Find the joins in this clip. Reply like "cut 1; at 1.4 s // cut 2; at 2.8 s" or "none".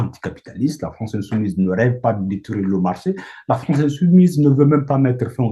none